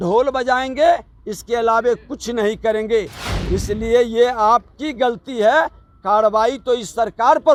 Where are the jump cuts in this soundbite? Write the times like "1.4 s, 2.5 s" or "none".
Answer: none